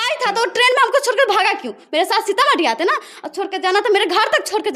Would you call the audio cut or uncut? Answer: uncut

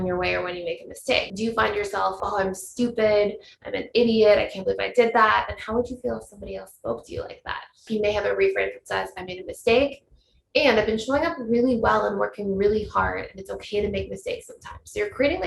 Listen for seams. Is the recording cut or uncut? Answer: cut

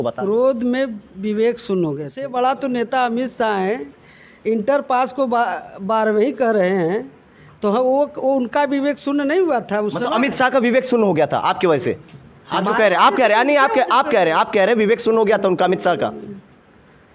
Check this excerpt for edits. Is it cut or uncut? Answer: cut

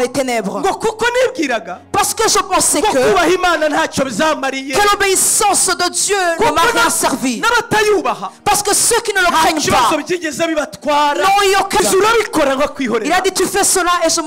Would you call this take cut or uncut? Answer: cut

